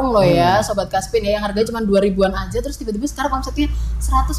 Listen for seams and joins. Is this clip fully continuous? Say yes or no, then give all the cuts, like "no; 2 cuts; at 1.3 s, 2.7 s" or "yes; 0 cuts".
yes; 0 cuts